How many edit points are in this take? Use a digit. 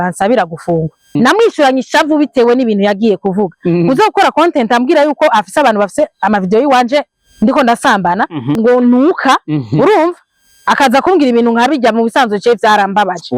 2